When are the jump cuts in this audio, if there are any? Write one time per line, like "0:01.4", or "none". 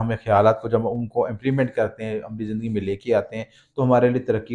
none